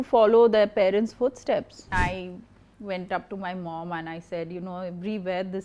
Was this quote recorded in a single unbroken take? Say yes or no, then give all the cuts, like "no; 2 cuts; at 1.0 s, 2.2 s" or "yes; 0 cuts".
no; 1 cut; at 1.9 s